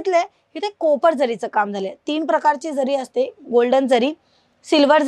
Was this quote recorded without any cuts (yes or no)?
yes